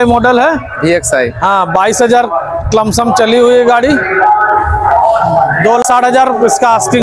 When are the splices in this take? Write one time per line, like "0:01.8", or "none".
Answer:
0:05.8